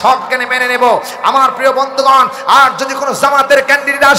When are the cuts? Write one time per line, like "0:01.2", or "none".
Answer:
none